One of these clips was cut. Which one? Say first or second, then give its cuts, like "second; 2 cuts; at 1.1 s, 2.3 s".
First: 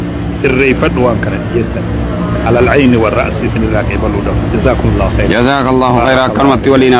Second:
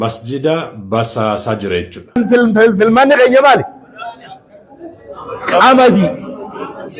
second; 1 cut; at 2.2 s